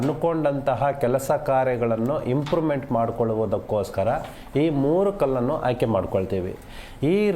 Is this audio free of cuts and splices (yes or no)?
no